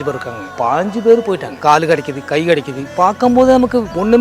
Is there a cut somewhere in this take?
no; 0 cuts

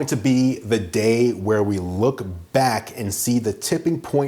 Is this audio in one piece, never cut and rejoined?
yes; 0 cuts

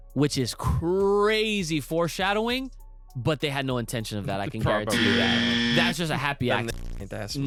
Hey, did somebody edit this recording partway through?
no; 0 cuts

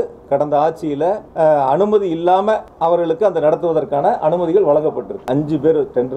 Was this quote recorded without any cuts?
no; 3 cuts; at 1.2 s, 2.7 s, 5.2 s

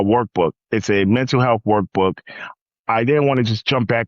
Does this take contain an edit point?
yes; 1 cut; at 2.5 s

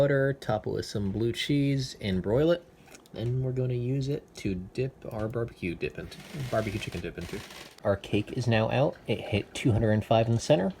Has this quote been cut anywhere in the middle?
yes; 1 cut; at 7.8 s

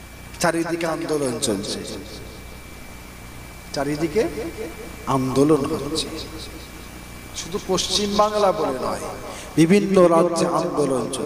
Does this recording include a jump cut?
no; 0 cuts

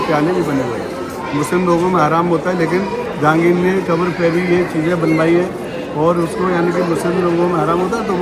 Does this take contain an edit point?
no; 0 cuts

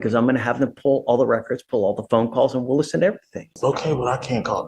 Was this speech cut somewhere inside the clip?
yes; 1 cut; at 3.5 s

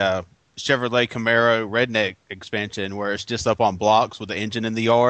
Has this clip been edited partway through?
no; 0 cuts

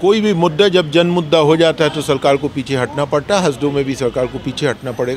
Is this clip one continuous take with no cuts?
yes; 0 cuts

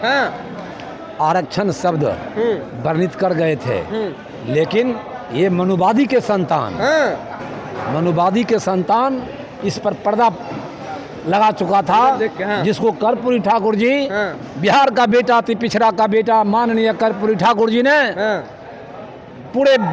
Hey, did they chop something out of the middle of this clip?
no; 0 cuts

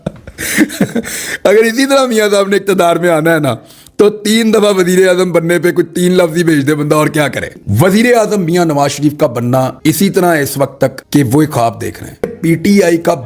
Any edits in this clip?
yes; 2 cuts; at 7.5 s, 12.3 s

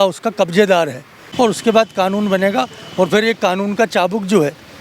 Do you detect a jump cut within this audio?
yes; 1 cut; at 1.2 s

